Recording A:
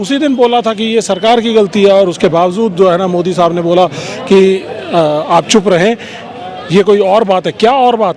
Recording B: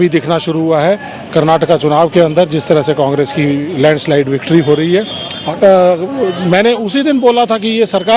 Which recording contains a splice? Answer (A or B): B